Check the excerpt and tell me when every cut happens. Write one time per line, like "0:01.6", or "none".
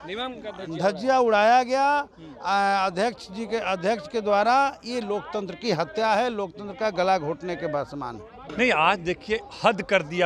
0:08.4